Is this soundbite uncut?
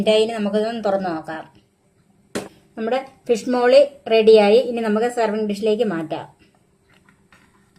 no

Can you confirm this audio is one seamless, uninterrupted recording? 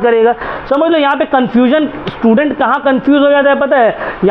no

